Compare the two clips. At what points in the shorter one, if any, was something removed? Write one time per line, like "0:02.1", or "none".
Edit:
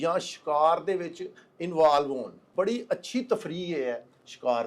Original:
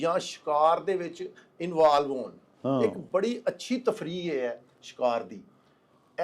0:02.4